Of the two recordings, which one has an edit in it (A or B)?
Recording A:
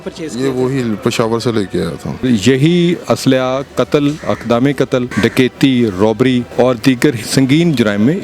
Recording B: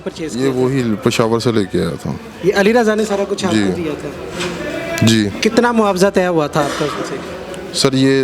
A